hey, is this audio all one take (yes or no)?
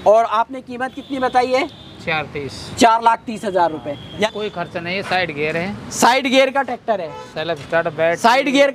no